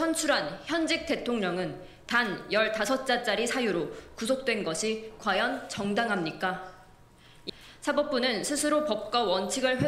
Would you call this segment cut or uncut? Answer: cut